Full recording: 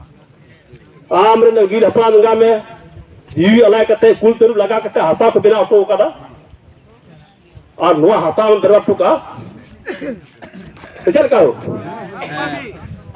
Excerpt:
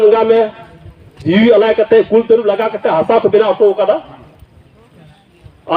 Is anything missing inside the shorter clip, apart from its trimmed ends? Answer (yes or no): no